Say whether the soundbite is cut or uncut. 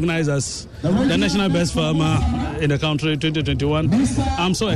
uncut